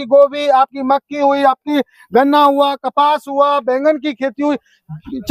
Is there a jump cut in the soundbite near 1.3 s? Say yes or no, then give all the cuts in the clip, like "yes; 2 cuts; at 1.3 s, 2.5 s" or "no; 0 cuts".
no; 0 cuts